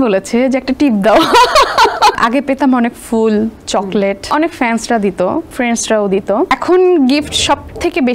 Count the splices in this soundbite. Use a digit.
4